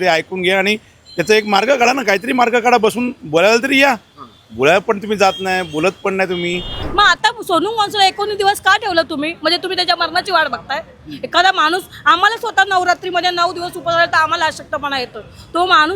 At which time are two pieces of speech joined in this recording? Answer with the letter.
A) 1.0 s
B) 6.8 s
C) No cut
B